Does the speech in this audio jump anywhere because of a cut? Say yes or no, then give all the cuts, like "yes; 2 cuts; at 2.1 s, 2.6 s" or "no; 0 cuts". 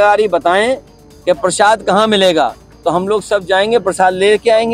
no; 0 cuts